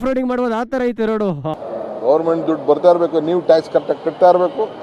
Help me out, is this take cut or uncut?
cut